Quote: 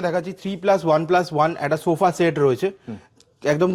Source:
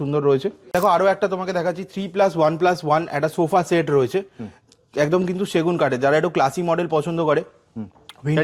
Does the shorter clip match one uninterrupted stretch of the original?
yes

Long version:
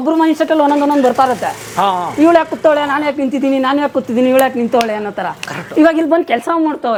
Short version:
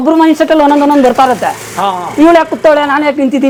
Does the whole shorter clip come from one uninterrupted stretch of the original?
yes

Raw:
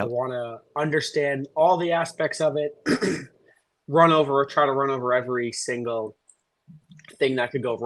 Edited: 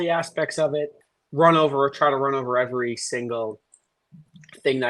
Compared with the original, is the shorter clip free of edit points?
no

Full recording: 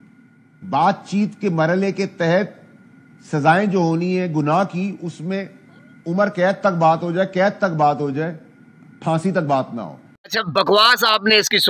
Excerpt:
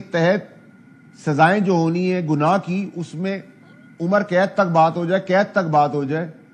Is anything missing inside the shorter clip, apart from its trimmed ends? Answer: no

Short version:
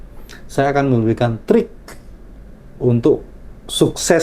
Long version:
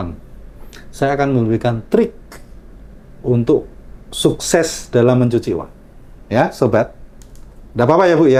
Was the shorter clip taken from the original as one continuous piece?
yes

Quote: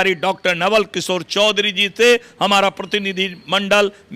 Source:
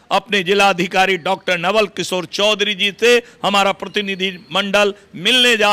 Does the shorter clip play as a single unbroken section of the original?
yes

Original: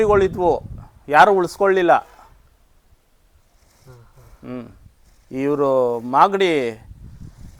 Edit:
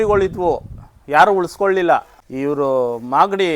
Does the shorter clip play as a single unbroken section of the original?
no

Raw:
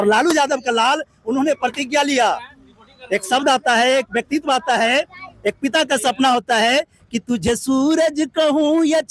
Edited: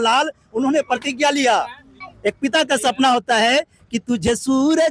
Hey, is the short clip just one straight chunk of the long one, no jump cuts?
no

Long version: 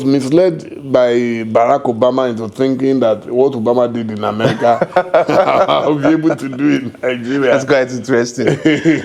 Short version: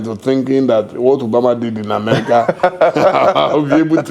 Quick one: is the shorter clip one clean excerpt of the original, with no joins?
yes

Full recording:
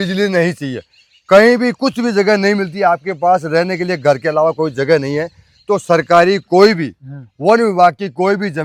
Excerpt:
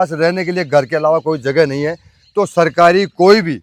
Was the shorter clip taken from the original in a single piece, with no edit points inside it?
yes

